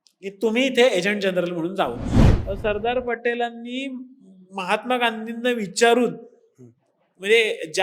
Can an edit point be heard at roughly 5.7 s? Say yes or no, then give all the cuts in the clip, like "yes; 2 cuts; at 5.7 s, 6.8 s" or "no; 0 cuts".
no; 1 cut; at 2.2 s